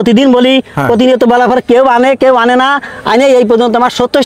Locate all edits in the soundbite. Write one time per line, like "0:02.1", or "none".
none